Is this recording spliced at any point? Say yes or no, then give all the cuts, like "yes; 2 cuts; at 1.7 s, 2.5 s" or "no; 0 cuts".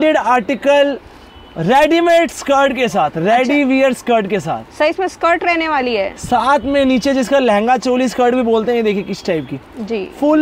no; 0 cuts